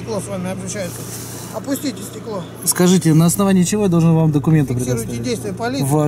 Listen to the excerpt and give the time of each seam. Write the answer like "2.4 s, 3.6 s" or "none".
5.0 s